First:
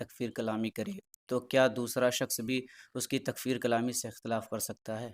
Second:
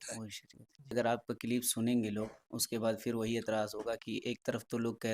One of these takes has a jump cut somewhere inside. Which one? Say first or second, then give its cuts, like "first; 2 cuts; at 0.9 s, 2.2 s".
second; 1 cut; at 0.9 s